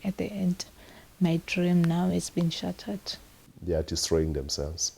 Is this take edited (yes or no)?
yes